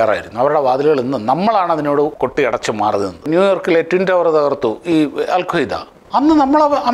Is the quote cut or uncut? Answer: cut